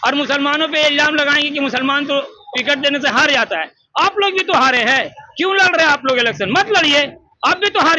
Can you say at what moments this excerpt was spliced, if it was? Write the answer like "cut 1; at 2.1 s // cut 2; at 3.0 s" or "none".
none